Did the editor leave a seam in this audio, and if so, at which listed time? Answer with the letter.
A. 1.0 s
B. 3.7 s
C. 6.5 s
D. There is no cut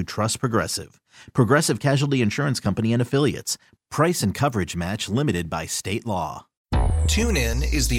C